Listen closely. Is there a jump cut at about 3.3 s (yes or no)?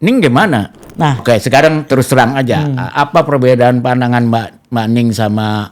no